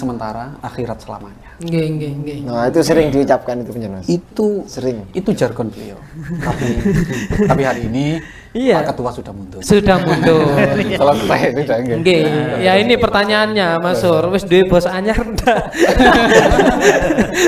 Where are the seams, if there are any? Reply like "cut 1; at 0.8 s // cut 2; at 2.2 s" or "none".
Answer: cut 1; at 6.3 s